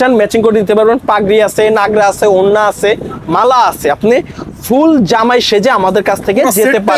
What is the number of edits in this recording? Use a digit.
0